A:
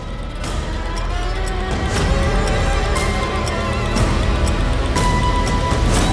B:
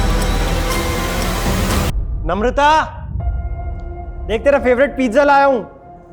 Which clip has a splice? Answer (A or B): B